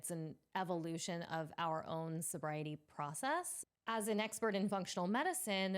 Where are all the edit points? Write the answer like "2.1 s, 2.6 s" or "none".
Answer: 3.6 s